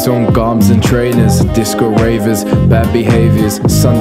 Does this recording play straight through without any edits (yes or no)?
yes